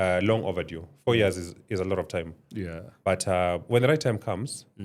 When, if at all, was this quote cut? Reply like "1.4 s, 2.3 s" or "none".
none